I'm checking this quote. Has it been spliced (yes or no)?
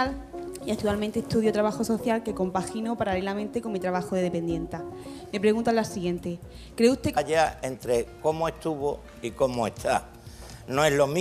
no